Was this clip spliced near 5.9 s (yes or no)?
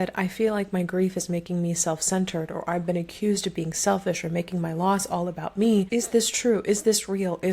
yes